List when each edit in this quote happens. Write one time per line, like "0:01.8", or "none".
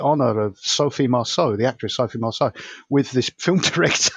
none